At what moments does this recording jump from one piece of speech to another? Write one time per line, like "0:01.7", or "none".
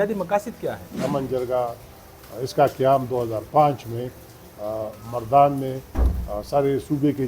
0:01.0